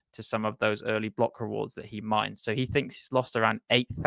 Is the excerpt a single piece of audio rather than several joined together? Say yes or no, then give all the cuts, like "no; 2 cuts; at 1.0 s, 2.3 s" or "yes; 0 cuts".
no; 1 cut; at 2.4 s